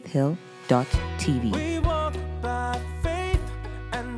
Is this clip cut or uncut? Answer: cut